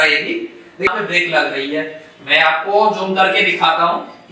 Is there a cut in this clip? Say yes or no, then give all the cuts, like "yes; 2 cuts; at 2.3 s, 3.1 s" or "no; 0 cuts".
yes; 1 cut; at 0.9 s